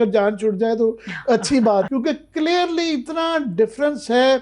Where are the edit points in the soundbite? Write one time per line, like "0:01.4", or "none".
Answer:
0:01.9